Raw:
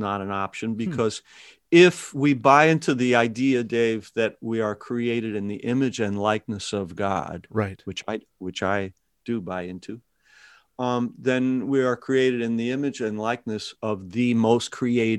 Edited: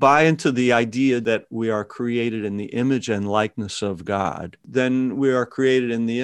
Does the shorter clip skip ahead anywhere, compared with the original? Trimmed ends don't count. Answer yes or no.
yes